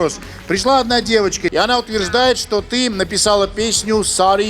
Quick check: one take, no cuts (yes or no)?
no